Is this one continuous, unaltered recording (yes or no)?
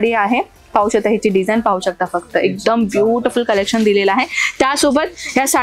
yes